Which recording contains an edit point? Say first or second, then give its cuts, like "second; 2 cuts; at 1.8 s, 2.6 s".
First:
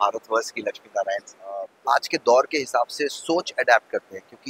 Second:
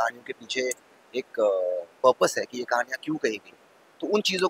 first; 1 cut; at 1.7 s